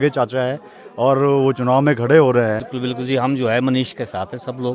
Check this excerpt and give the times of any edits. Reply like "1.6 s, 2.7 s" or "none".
2.7 s